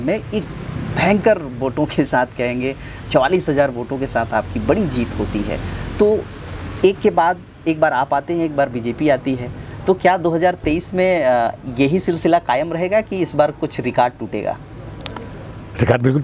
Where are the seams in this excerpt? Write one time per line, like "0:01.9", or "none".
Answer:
none